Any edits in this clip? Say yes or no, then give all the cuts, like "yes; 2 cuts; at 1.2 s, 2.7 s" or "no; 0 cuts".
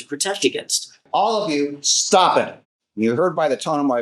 yes; 1 cut; at 1.0 s